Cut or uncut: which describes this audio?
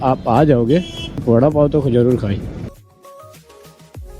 cut